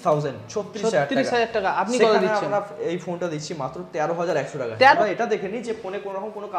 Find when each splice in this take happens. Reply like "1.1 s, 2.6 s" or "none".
5.0 s